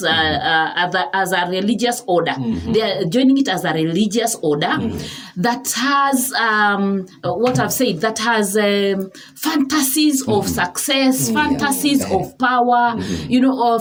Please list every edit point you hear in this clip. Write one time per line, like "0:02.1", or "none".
none